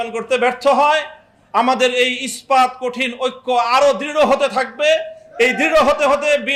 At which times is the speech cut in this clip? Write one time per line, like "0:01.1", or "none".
none